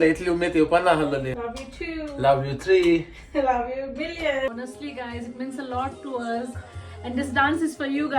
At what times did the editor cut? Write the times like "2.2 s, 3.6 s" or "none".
1.4 s, 4.5 s